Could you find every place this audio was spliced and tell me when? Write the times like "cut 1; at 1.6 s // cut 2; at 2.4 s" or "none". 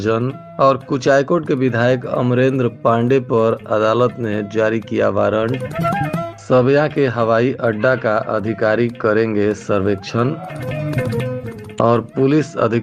none